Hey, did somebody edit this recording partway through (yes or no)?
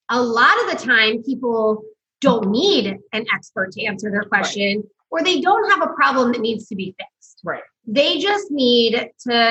no